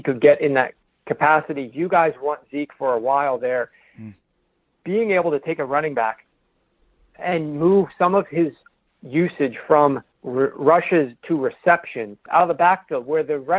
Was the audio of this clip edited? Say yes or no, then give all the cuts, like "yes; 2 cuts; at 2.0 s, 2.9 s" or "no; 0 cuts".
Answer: yes; 1 cut; at 12.1 s